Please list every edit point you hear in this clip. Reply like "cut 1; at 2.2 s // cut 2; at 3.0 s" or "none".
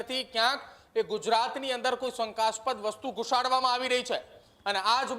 none